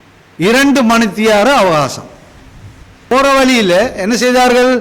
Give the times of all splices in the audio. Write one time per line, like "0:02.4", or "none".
0:03.1